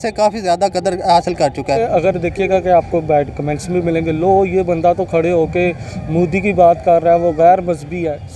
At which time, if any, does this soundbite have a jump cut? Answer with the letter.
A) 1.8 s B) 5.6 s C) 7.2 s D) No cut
A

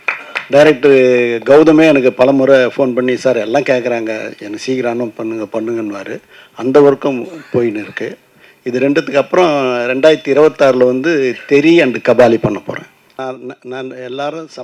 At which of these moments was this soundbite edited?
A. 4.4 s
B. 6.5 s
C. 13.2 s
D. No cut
C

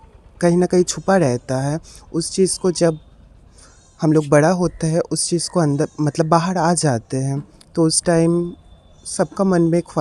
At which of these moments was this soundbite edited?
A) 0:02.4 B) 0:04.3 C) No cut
C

